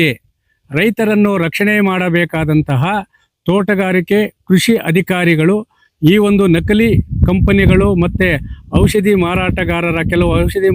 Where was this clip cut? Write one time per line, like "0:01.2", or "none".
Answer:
none